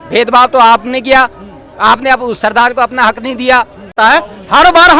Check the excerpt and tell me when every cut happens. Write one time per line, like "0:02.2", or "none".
0:03.9